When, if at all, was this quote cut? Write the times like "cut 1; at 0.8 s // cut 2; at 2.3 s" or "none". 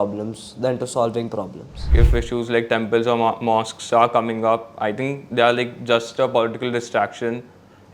cut 1; at 1.9 s